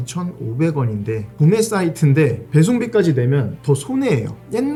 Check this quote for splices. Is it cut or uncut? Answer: uncut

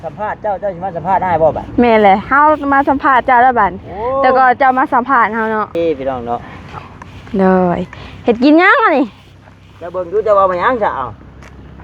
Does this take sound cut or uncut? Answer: cut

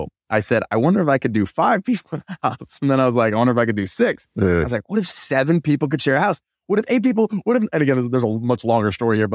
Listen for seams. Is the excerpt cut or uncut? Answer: uncut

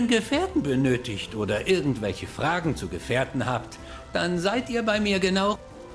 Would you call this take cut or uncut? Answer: uncut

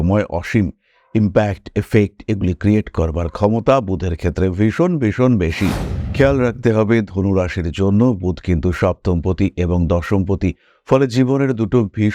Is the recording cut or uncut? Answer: cut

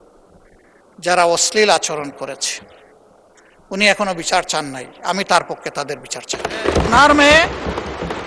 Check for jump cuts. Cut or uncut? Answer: cut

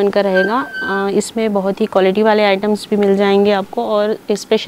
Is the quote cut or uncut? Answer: uncut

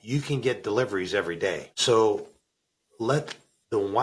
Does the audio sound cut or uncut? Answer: cut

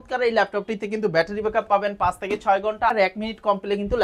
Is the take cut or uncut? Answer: cut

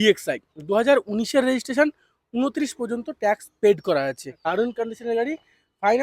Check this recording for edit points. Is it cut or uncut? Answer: cut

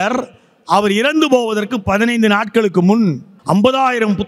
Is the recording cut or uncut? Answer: cut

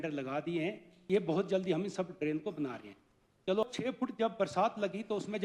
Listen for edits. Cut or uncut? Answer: cut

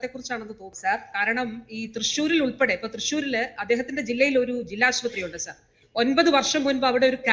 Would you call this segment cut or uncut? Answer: uncut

